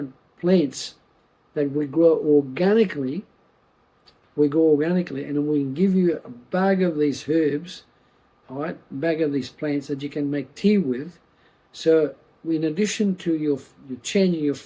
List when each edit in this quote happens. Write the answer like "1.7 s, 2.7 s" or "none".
4.1 s